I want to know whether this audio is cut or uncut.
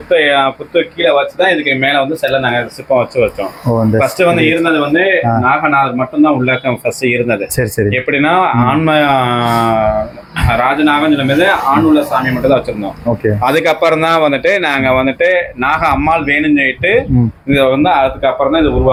uncut